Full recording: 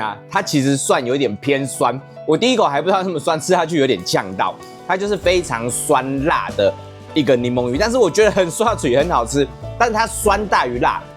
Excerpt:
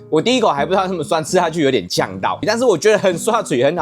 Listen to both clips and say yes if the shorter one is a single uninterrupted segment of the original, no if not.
no